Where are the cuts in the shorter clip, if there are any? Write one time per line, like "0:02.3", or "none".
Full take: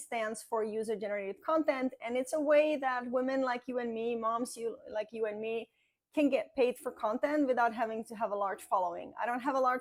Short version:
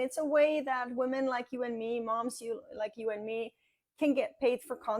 none